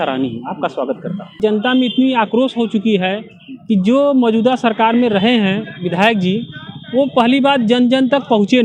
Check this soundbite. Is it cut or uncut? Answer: cut